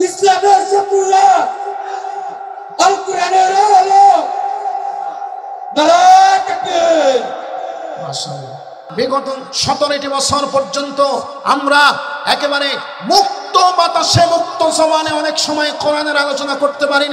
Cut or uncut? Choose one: cut